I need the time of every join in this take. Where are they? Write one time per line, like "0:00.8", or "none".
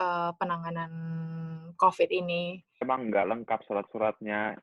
0:02.8

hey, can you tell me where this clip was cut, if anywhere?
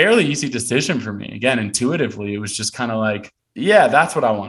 0:03.4

